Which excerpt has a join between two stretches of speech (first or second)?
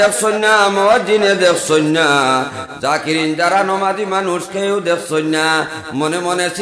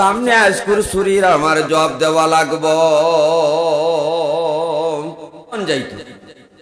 second